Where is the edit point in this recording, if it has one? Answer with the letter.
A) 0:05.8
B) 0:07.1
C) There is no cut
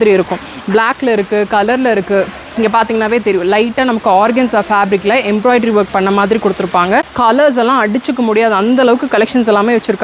B